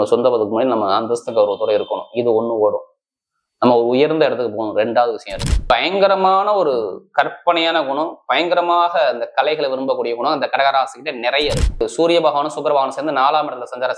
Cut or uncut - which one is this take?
cut